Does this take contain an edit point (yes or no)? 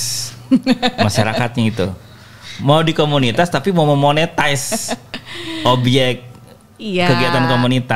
no